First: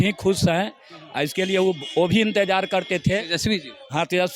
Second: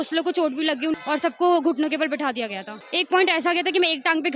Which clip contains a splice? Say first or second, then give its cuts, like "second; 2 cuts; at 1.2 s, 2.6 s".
second; 2 cuts; at 1.0 s, 2.8 s